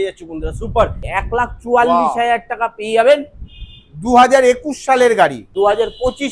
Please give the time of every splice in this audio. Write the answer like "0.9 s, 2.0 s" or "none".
1.0 s, 5.5 s